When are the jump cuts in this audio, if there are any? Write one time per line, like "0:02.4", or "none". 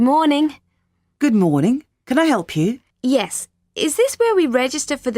0:02.9